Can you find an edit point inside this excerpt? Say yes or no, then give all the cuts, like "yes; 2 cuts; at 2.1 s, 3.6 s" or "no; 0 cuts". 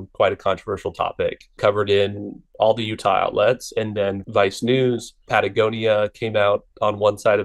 no; 0 cuts